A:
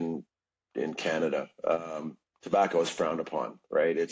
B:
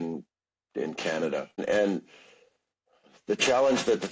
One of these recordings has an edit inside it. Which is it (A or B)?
B